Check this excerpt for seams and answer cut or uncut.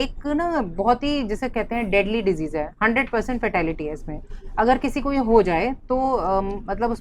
uncut